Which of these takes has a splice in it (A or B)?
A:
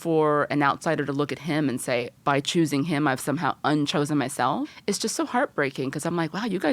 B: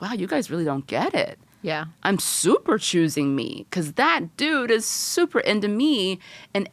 A